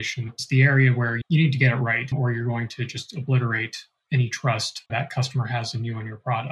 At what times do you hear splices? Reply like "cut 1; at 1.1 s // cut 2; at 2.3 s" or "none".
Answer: cut 1; at 4.9 s